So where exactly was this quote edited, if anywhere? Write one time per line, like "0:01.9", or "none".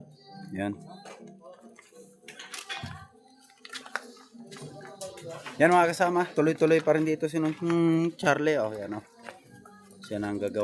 none